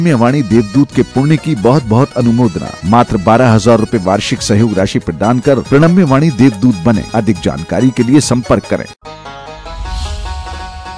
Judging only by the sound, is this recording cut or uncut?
cut